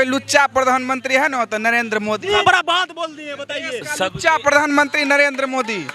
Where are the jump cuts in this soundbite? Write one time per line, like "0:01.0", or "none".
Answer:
0:02.4

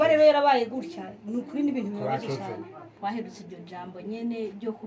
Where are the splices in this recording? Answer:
0:02.9

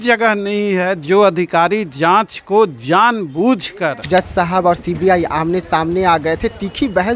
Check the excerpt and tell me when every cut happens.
0:04.0

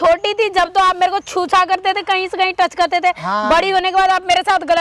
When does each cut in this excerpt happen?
none

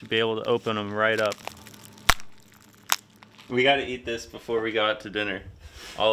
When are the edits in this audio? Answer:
0:01.4
0:03.4

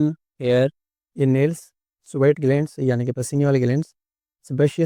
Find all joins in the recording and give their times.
none

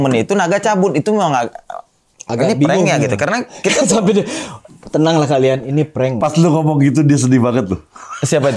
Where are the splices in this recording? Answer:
0:06.2

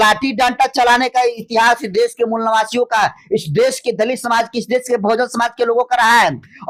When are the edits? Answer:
none

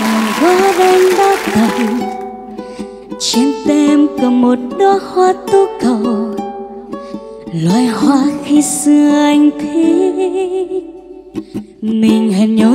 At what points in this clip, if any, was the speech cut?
none

